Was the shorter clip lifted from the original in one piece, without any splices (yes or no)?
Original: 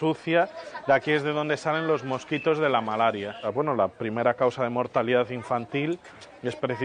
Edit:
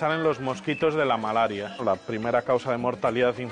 no